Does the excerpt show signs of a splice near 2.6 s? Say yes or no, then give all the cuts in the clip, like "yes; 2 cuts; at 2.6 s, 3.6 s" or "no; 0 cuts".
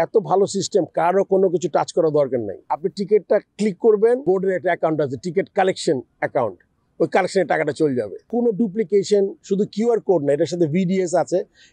yes; 3 cuts; at 2.6 s, 4.2 s, 8.2 s